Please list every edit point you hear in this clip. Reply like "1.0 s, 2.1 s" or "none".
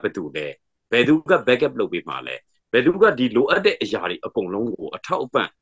none